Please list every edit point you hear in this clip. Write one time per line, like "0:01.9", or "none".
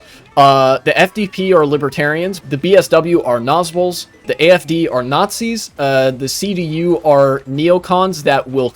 0:02.4
0:04.3